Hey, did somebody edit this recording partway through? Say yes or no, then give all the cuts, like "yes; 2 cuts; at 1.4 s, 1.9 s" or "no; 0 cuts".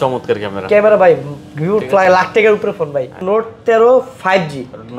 yes; 1 cut; at 3.2 s